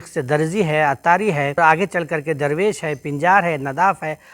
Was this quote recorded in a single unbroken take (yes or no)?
no